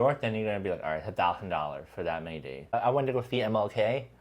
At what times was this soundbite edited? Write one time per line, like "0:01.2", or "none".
0:02.7